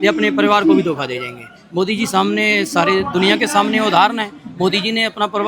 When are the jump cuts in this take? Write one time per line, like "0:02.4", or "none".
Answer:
none